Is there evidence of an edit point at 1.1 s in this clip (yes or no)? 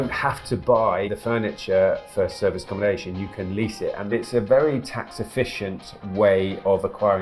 yes